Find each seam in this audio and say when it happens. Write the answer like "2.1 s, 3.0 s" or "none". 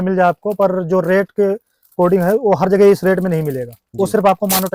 none